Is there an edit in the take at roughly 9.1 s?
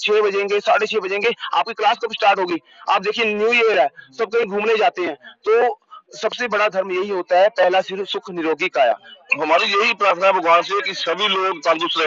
yes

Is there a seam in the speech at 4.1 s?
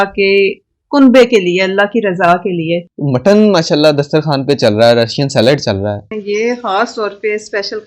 no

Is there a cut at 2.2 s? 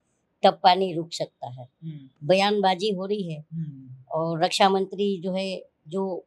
yes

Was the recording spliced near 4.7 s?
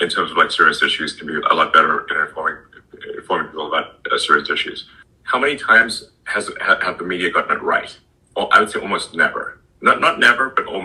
no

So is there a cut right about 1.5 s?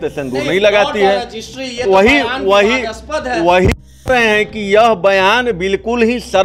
no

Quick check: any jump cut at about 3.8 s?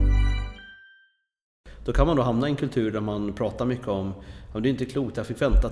no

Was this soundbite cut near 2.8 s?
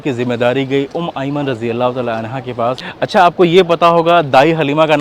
yes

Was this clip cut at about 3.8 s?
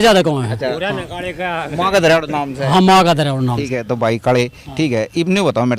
no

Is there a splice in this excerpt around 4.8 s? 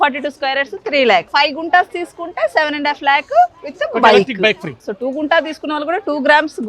yes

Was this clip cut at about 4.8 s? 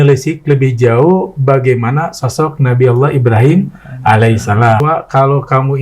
yes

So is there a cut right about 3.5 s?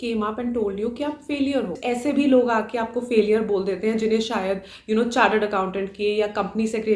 no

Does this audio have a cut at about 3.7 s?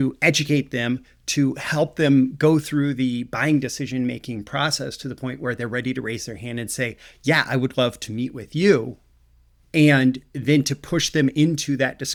no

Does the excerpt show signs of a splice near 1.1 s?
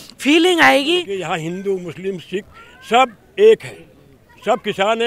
yes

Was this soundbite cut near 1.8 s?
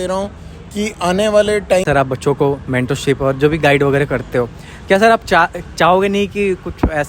yes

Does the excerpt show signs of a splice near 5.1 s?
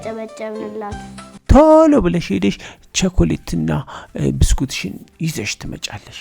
no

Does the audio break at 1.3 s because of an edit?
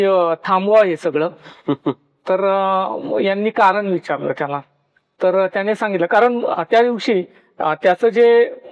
no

